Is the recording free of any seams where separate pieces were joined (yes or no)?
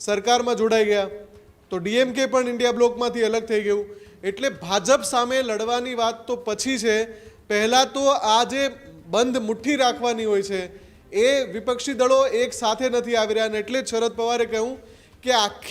yes